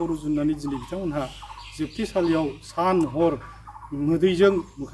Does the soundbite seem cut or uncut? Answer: uncut